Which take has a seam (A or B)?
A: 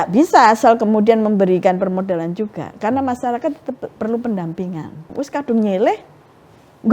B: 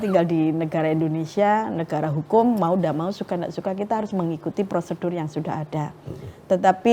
A